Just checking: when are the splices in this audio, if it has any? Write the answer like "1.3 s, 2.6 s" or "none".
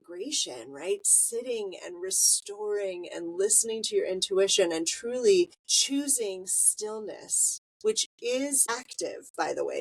5.7 s, 8.8 s